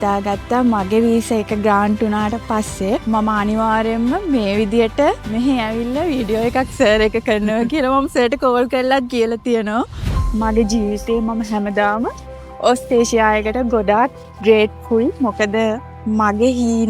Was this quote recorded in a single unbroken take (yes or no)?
no